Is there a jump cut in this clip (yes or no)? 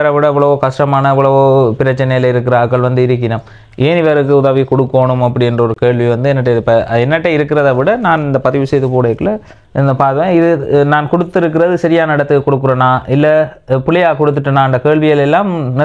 no